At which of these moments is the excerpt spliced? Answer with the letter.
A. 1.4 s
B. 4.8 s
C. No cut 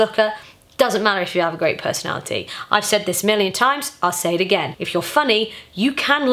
B